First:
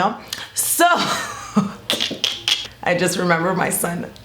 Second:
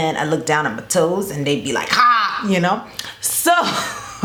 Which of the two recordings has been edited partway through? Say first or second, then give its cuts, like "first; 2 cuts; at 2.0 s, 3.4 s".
first; 1 cut; at 2.7 s